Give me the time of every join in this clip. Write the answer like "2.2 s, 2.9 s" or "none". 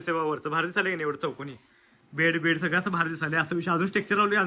none